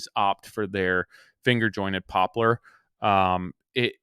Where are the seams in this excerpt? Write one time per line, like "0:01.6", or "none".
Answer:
none